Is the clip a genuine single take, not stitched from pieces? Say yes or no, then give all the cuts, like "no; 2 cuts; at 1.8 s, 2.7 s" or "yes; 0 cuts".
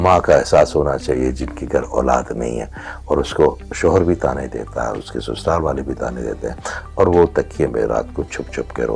yes; 0 cuts